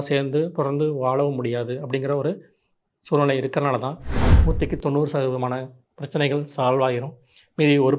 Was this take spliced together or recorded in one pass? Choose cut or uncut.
cut